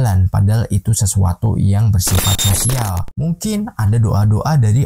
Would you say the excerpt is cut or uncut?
cut